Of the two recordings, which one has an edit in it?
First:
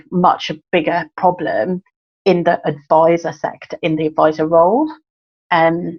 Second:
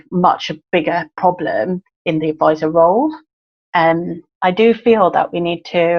second; 2 cuts; at 1.9 s, 4.2 s

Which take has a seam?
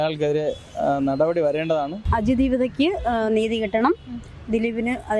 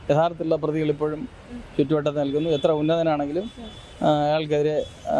first; 1 cut; at 2.1 s

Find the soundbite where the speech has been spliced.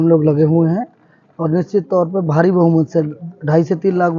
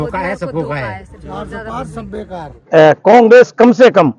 second; 1 cut; at 2.6 s

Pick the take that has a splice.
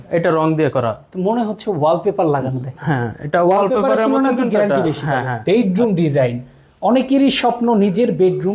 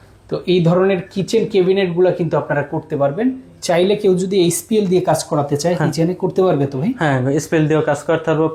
first; 1 cut; at 5.3 s

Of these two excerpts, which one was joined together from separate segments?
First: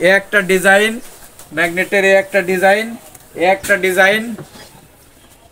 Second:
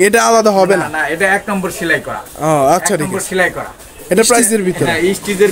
second; 1 cut; at 4.5 s

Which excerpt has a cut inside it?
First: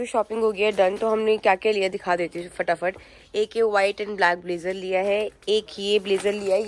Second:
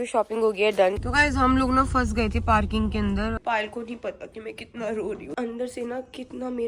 second; 3 cuts; at 1.0 s, 3.4 s, 5.3 s

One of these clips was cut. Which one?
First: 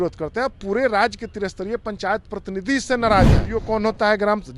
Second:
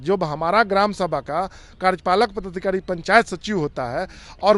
first; 1 cut; at 3.5 s

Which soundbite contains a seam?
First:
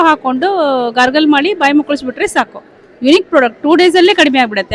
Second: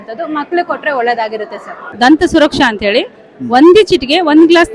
second; 1 cut; at 1.8 s

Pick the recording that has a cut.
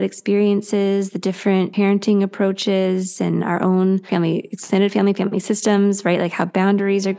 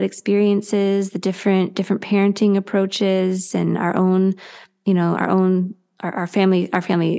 first; 2 cuts; at 1.7 s, 4.1 s

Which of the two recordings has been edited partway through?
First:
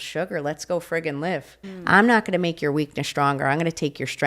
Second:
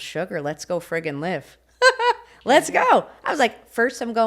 first; 1 cut; at 1.6 s

